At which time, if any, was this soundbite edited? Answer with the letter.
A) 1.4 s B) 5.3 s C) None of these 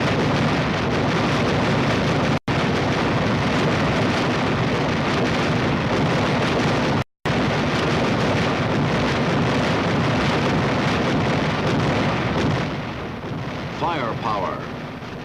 A